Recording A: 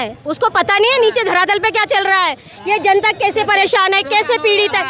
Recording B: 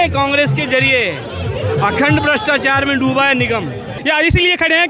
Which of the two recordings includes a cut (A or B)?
B